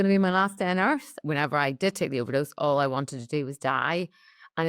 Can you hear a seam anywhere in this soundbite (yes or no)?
yes